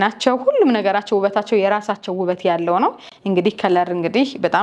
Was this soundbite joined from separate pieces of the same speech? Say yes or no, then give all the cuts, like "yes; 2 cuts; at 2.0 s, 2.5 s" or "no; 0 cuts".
no; 0 cuts